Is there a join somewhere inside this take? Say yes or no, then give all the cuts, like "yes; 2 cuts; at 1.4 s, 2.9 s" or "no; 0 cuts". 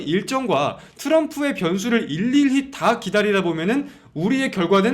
no; 0 cuts